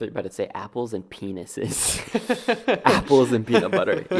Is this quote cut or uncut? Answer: uncut